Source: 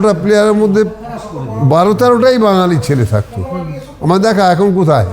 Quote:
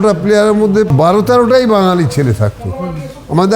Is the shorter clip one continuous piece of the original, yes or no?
no